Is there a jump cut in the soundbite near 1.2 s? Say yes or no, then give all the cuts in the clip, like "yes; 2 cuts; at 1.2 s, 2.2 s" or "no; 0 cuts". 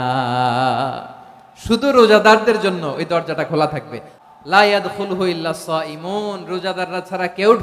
no; 1 cut; at 4.1 s